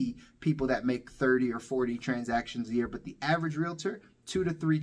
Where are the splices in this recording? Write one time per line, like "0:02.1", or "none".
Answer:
none